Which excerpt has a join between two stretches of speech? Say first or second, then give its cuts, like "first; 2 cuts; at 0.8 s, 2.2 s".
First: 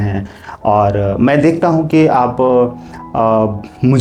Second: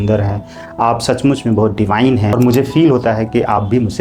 second; 1 cut; at 2.3 s